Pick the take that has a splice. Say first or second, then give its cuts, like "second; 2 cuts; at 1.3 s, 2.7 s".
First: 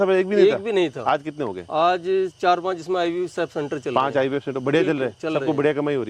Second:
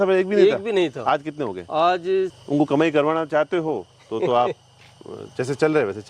second; 1 cut; at 2.3 s